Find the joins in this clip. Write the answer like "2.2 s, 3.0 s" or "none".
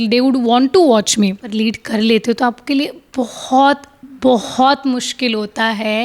1.5 s